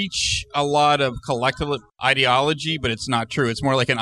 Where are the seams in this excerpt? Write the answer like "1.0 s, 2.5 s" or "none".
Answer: 1.9 s